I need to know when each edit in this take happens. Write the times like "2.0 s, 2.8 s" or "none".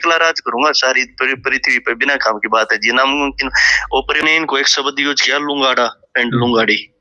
4.2 s